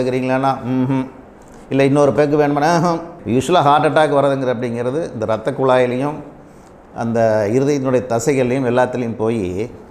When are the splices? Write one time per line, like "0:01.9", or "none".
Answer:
0:03.1

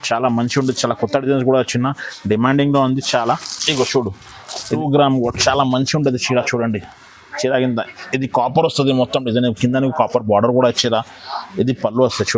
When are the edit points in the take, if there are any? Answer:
0:04.6

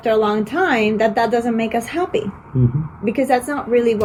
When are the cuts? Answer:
none

